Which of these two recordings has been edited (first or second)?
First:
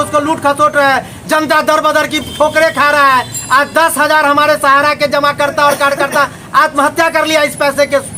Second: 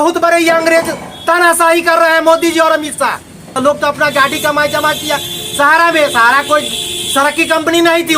second